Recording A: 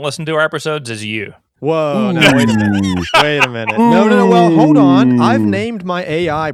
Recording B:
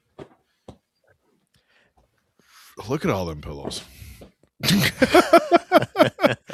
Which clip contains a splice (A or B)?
A